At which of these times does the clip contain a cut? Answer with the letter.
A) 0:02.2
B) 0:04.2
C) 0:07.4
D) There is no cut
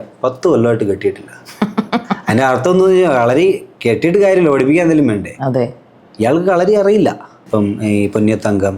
C